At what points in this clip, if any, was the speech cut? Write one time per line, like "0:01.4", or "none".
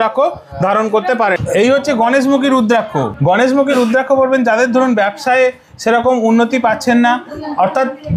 none